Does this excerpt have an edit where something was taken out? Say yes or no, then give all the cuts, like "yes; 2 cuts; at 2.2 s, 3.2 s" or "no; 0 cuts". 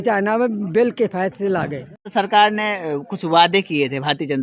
yes; 1 cut; at 1.9 s